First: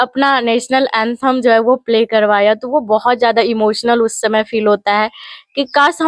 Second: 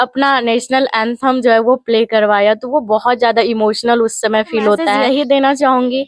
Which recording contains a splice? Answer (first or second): second